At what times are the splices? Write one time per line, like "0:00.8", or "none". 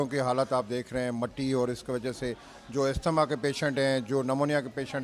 none